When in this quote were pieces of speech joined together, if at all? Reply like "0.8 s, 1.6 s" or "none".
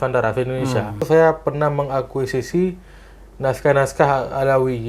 1.1 s

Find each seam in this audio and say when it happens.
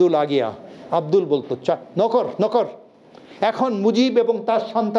none

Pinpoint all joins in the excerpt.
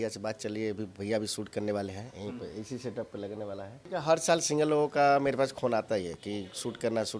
3.7 s

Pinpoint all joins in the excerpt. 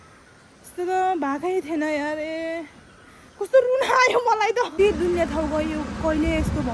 4.7 s

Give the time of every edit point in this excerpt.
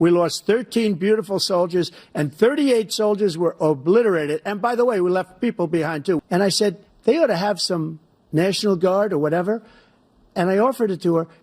6.2 s

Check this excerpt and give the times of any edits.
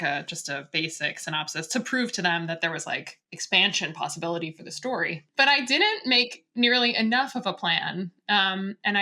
5.2 s

